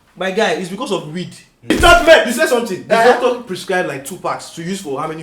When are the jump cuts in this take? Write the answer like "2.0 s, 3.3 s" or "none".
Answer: 1.7 s